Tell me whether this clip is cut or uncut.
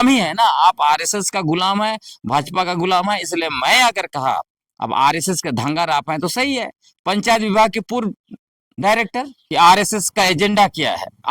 cut